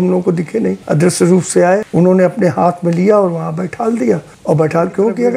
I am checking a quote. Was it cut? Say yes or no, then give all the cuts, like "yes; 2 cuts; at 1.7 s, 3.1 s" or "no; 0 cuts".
yes; 3 cuts; at 0.8 s, 1.9 s, 4.3 s